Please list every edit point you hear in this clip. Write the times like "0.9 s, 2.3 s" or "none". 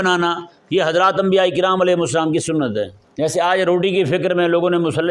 3.0 s